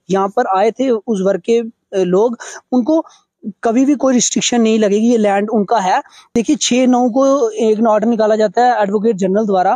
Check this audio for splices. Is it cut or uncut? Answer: cut